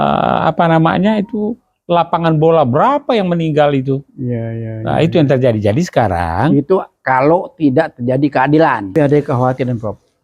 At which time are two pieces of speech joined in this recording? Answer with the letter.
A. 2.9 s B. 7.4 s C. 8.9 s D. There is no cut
C